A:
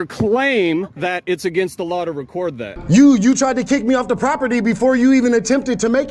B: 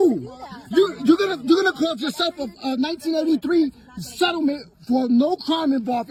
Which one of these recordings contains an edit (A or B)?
A